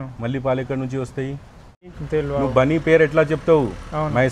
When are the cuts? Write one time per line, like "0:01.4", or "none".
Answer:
0:01.9